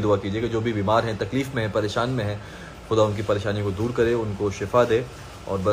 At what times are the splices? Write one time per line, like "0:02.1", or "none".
none